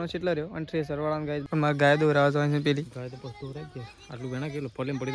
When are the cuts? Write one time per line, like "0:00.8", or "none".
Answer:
0:01.4